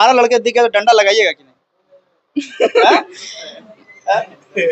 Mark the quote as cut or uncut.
uncut